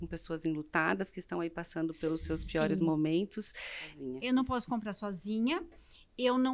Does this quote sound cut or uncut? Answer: cut